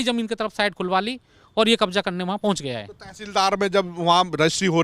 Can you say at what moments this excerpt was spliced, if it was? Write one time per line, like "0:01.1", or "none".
none